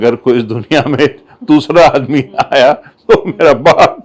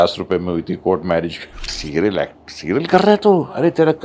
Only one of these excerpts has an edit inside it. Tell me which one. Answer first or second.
second